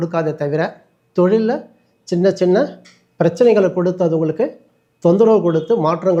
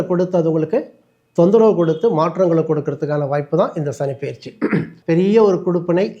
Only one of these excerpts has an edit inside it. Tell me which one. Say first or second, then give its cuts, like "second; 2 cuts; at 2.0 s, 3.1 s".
second; 1 cut; at 4.9 s